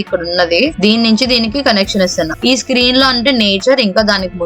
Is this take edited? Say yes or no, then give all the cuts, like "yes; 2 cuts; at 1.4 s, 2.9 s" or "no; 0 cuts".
no; 0 cuts